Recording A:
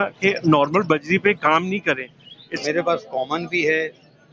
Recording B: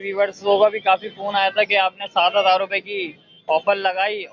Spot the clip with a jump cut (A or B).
A